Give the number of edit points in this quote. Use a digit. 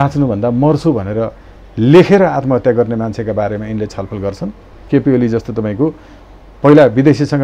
1